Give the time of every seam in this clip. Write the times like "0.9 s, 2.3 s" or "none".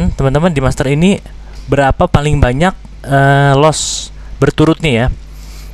none